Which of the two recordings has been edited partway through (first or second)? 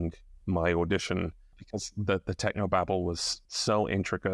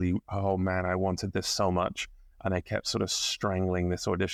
first